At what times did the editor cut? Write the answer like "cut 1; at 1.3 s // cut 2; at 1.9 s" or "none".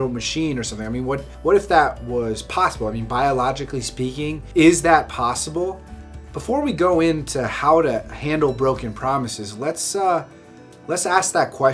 cut 1; at 4.5 s